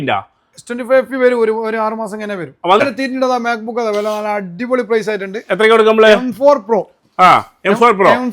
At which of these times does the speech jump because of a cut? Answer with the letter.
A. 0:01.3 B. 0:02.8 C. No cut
B